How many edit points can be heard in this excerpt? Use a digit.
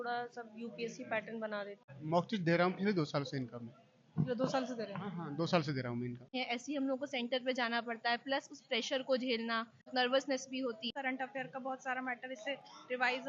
4